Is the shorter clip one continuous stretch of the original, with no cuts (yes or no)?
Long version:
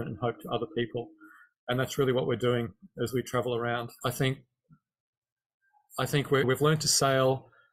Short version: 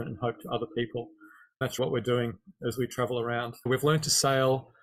no